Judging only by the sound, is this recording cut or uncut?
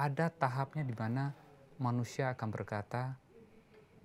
uncut